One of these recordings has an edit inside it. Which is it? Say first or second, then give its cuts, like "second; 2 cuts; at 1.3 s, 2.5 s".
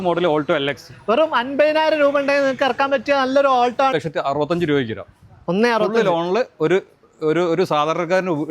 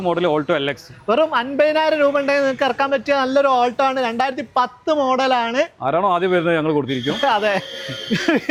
first; 1 cut; at 3.9 s